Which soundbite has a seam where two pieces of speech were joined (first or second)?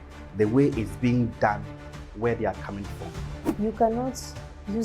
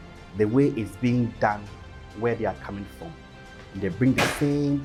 first